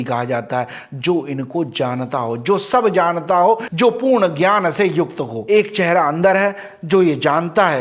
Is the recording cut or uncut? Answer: cut